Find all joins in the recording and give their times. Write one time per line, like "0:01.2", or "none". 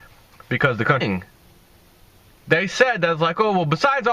none

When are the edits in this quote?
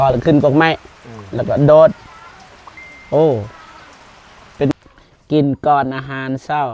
0:04.7

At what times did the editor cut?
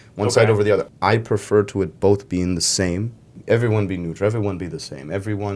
0:00.9
0:03.4

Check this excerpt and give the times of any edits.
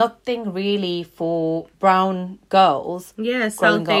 0:01.7

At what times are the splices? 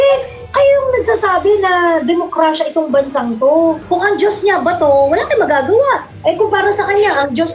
0:03.8
0:06.1

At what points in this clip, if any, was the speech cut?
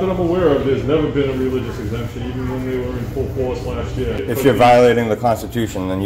0:04.2

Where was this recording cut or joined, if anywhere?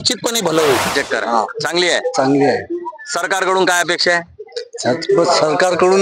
0:00.9

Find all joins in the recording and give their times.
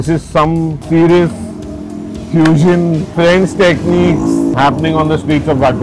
0:00.8
0:03.1
0:04.5

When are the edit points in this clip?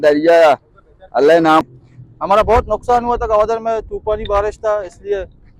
0:01.6

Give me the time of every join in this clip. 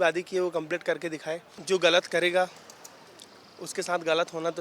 0:01.5

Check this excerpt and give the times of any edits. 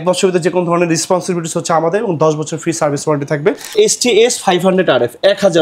0:03.7

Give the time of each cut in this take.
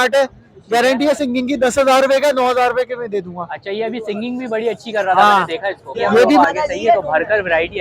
0:06.4

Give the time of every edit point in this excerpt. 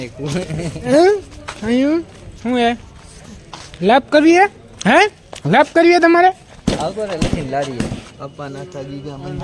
none

